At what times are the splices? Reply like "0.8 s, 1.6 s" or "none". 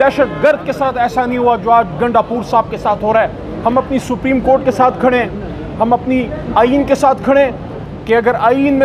3.5 s, 7.7 s